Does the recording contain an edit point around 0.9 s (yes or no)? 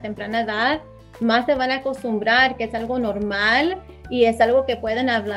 no